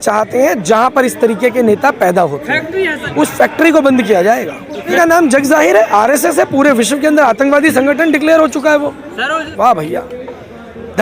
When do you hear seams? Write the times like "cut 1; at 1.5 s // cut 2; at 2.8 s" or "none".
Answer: cut 1; at 3.0 s // cut 2; at 4.9 s // cut 3; at 9.5 s